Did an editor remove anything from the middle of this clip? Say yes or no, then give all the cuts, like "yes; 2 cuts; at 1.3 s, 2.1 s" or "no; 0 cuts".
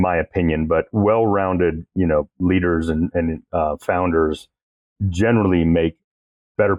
no; 0 cuts